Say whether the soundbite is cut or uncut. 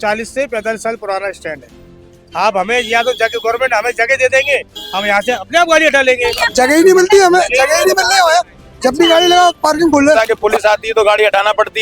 cut